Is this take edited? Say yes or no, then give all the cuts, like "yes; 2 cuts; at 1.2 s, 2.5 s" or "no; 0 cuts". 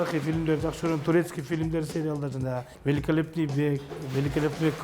yes; 1 cut; at 2.7 s